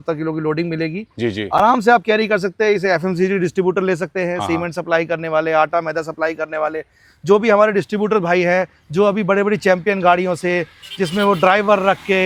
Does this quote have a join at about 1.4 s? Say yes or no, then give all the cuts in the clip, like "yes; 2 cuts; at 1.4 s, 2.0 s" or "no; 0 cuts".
no; 0 cuts